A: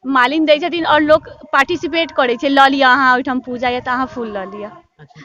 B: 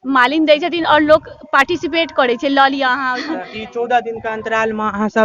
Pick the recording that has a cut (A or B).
B